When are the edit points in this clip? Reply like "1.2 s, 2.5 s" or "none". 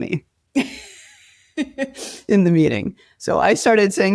none